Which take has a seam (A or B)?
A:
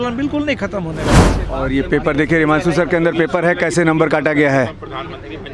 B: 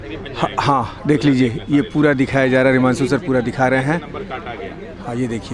A